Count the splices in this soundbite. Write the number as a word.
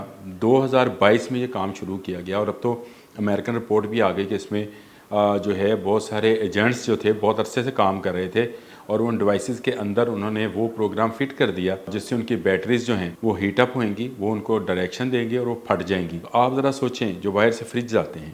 three